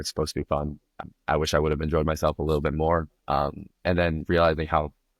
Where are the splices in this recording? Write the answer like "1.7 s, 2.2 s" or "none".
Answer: 0.9 s